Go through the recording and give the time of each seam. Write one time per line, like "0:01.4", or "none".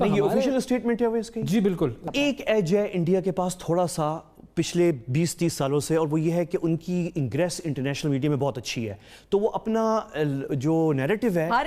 0:02.0